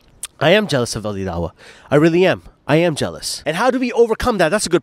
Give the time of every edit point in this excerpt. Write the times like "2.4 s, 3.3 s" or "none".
3.3 s